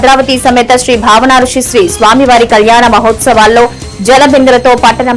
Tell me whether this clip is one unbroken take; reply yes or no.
yes